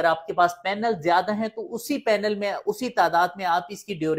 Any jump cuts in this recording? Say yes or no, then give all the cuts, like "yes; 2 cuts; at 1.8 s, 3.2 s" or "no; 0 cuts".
no; 0 cuts